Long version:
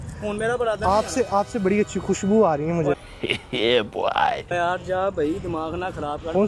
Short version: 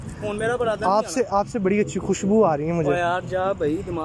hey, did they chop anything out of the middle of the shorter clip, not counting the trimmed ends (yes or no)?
yes